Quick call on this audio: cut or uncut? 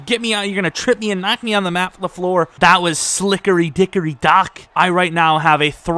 cut